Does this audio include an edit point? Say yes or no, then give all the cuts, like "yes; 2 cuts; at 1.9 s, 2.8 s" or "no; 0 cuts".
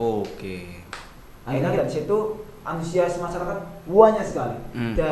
yes; 1 cut; at 1.6 s